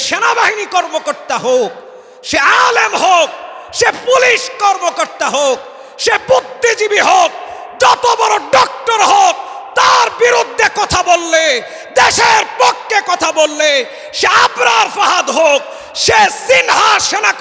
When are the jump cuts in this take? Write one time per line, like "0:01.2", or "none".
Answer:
none

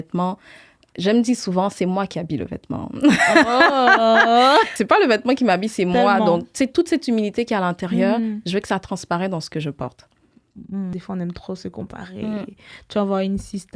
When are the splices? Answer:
0:04.8
0:10.9

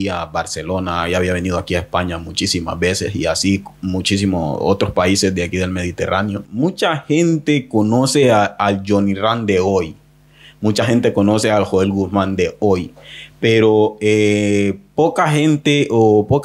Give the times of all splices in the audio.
0:06.4

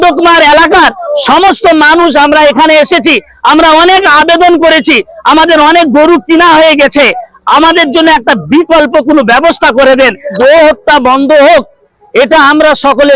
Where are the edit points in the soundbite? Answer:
0:10.3

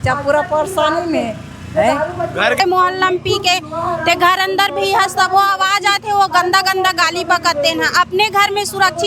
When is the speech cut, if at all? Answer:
0:02.6

